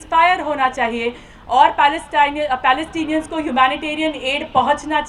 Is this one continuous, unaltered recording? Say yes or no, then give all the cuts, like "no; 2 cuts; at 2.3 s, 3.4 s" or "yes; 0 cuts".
yes; 0 cuts